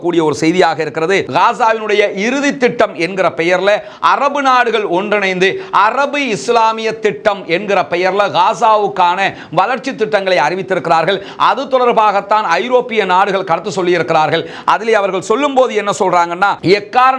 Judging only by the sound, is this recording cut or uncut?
uncut